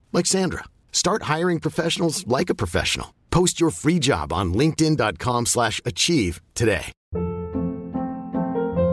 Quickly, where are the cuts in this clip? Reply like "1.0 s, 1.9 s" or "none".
7.0 s